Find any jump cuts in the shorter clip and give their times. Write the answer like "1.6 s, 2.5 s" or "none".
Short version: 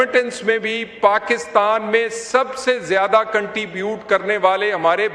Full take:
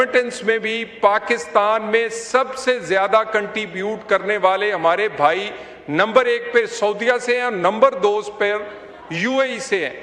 none